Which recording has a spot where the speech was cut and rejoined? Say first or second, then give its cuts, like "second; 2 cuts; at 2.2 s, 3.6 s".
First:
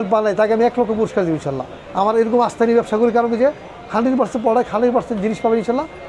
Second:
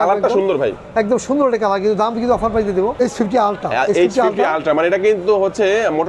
second; 1 cut; at 3.0 s